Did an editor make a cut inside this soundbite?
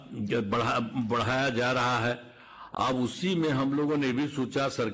no; 0 cuts

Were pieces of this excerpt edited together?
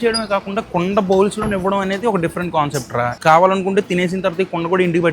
yes; 1 cut; at 3.2 s

